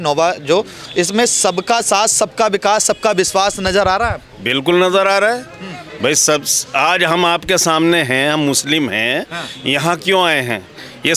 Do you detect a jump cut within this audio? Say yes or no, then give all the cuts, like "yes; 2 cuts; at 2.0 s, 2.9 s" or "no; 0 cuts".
no; 0 cuts